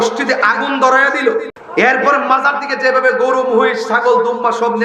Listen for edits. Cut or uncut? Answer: cut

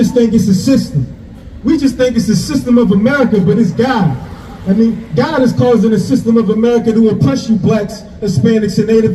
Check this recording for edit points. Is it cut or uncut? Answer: uncut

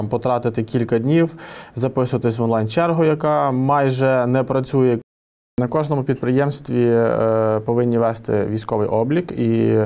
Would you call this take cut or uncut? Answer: cut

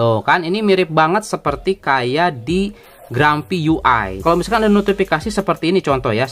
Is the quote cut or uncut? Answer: cut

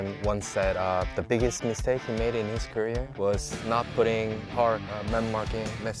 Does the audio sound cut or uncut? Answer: uncut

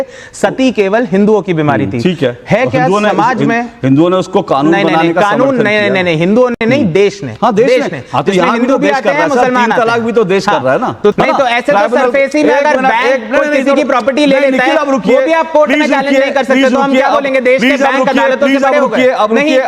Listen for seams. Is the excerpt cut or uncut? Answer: cut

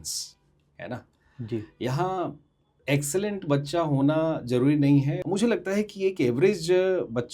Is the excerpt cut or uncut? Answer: cut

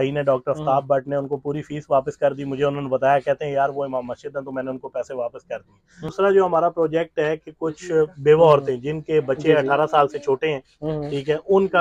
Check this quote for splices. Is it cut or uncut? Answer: cut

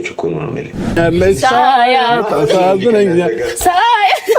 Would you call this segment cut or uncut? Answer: cut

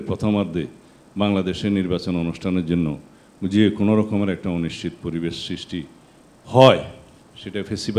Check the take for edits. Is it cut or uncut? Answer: uncut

